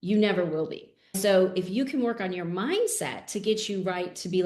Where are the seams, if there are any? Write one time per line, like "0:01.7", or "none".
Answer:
0:01.2